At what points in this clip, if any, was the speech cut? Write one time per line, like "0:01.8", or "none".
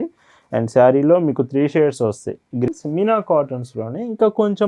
0:02.7